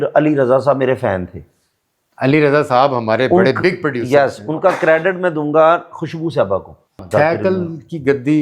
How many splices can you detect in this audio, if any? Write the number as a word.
one